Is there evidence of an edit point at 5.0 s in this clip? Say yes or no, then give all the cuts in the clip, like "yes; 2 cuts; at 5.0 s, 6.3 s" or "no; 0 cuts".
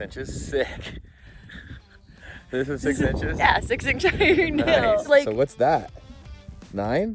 yes; 1 cut; at 5.0 s